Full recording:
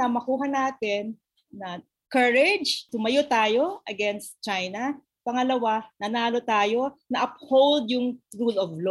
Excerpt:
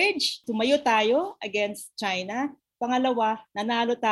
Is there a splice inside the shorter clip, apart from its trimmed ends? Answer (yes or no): no